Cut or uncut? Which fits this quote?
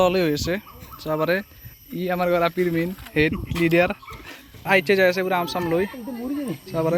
uncut